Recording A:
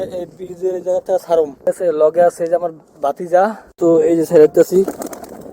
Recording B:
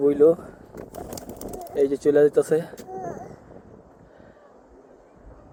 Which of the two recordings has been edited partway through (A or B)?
A